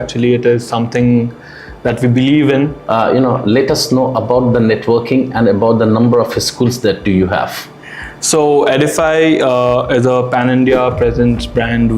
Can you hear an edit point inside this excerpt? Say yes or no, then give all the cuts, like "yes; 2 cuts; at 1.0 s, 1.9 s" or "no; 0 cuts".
yes; 1 cut; at 2.8 s